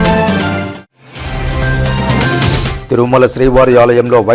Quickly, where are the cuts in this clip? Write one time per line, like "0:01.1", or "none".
0:00.9
0:02.7